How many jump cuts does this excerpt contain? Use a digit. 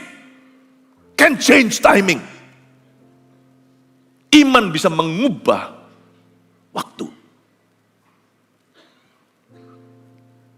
0